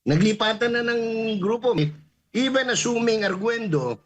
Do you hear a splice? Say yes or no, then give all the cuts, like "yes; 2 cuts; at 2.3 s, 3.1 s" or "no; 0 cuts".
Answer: yes; 1 cut; at 1.8 s